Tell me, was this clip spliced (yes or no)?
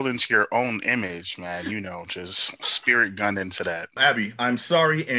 yes